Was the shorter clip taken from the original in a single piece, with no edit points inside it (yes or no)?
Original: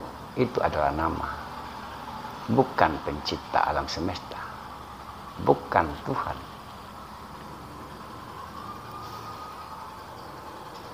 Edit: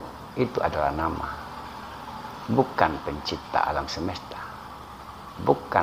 yes